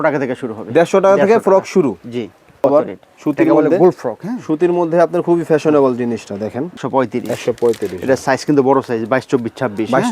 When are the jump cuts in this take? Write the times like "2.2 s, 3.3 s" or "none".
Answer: 2.6 s, 6.8 s